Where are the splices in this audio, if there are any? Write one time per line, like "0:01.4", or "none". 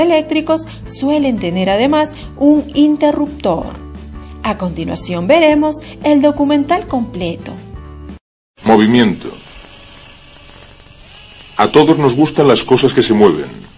none